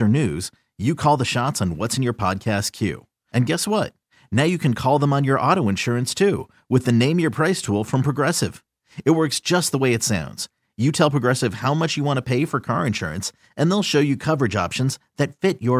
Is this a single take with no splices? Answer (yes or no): yes